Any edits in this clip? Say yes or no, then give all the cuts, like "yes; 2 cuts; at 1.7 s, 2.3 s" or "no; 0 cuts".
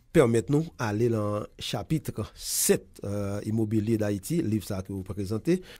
no; 0 cuts